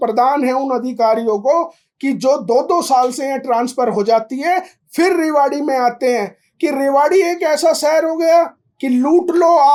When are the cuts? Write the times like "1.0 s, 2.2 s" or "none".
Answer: none